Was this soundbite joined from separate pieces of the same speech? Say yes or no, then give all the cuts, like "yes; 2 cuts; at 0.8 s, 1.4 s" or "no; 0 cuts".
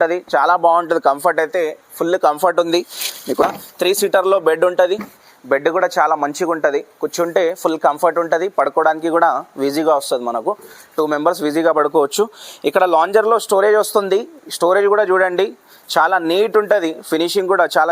yes; 1 cut; at 3.4 s